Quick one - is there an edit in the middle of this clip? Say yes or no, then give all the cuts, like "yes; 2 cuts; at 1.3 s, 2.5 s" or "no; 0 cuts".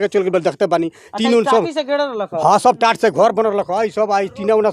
no; 0 cuts